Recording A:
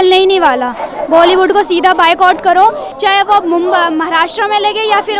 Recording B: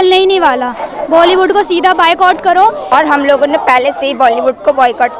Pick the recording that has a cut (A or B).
B